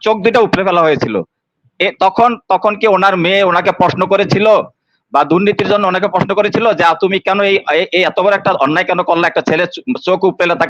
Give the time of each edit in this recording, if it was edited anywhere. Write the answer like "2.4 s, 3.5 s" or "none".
none